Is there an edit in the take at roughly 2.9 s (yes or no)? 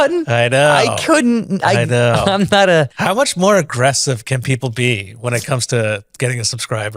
yes